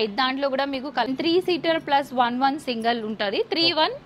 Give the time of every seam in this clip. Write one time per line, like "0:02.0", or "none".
0:01.1